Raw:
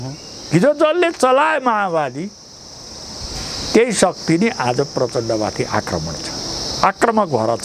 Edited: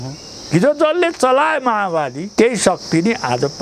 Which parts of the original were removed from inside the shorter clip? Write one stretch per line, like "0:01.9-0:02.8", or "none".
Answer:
0:02.2-0:03.6

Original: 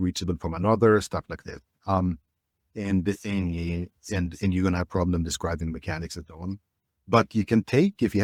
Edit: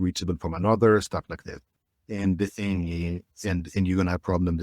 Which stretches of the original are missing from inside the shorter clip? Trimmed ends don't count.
0:01.7-0:02.3

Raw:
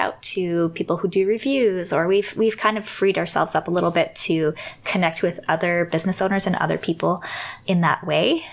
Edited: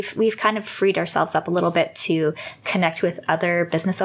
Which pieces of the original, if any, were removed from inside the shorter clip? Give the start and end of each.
none

